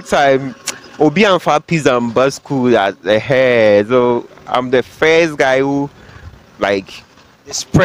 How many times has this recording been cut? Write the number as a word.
zero